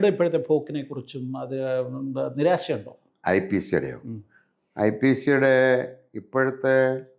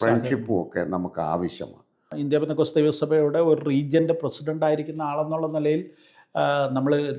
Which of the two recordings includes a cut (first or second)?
second